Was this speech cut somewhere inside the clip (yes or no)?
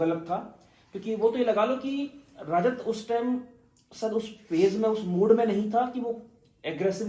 no